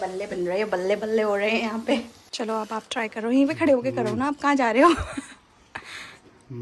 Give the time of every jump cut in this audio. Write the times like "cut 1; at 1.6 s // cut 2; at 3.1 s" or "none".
cut 1; at 2.2 s